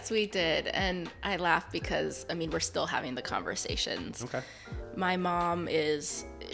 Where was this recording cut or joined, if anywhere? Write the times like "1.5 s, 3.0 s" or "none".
none